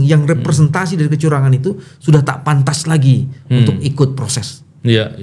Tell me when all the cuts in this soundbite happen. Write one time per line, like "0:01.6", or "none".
none